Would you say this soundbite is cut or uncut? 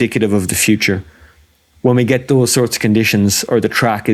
uncut